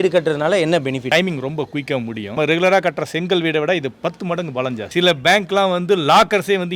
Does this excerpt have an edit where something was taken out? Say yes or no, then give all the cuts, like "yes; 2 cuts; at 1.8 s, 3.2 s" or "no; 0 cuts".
yes; 3 cuts; at 1.1 s, 2.3 s, 4.9 s